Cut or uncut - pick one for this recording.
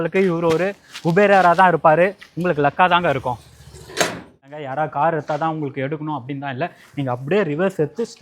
cut